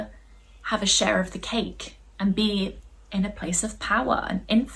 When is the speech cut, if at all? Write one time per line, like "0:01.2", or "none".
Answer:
none